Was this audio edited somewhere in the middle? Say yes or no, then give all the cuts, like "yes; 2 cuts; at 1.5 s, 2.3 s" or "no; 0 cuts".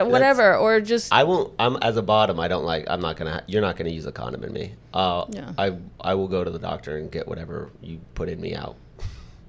no; 0 cuts